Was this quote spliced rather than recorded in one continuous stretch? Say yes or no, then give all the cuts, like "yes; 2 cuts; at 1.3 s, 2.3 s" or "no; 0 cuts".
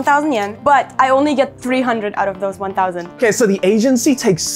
yes; 1 cut; at 3.2 s